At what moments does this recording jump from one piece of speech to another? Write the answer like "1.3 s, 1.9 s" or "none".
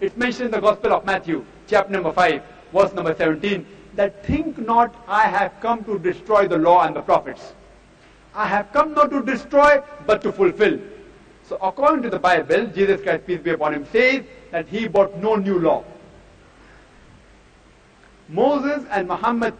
5.0 s